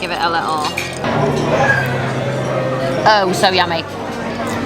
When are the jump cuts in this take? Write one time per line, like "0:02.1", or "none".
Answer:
0:01.1